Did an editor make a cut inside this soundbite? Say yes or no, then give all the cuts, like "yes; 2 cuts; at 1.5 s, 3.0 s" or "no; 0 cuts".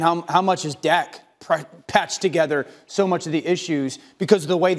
no; 0 cuts